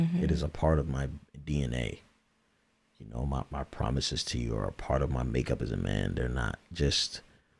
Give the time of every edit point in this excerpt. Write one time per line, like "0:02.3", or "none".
none